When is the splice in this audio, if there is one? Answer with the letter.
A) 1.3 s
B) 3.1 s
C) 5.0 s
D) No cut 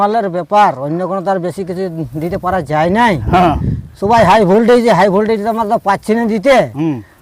D